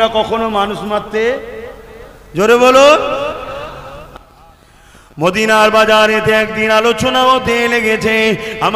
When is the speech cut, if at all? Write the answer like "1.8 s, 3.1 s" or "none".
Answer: 4.1 s